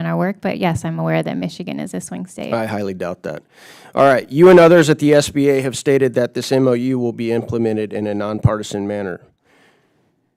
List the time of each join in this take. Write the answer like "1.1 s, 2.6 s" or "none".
none